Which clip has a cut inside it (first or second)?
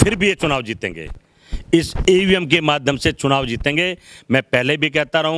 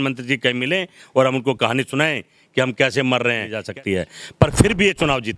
second